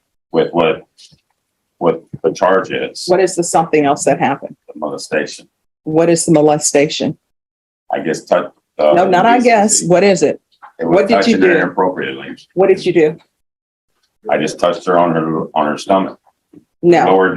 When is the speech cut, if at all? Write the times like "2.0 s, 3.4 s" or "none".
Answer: none